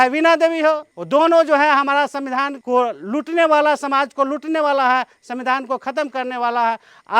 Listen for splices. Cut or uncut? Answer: cut